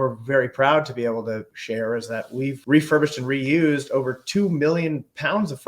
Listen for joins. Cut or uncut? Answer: cut